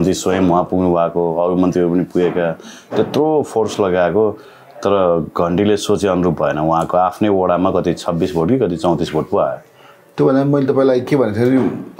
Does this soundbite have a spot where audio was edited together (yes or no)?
no